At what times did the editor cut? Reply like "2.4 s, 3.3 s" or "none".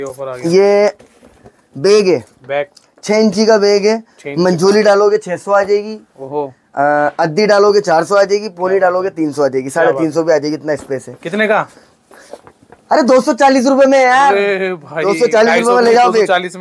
none